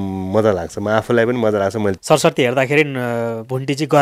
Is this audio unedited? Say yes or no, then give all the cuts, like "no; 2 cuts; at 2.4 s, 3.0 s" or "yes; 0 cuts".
no; 1 cut; at 2.0 s